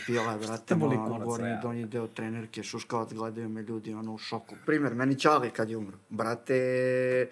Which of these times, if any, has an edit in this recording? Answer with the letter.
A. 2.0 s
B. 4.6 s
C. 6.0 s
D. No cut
B